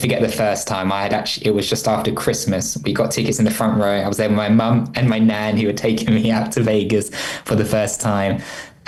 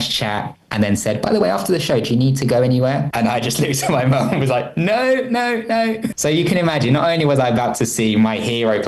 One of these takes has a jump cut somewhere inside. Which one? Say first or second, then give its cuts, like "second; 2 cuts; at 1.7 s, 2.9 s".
second; 2 cuts; at 3.1 s, 6.1 s